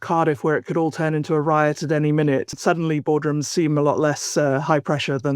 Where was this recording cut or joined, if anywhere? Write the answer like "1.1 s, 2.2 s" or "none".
2.6 s

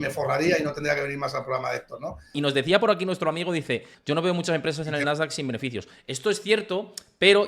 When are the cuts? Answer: 2.3 s, 3.9 s

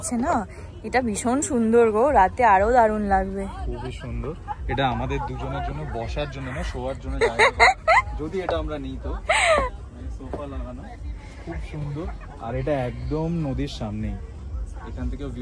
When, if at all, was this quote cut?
none

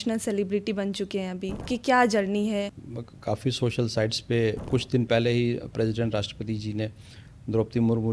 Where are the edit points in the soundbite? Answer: 1.7 s, 2.8 s, 4.6 s

